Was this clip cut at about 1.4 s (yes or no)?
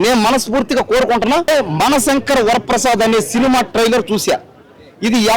yes